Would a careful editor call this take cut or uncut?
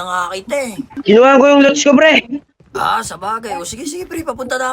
cut